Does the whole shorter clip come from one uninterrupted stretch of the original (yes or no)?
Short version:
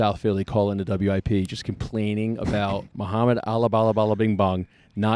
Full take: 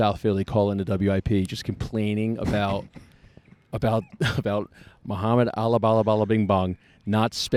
no